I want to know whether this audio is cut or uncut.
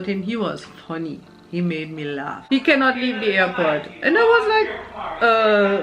cut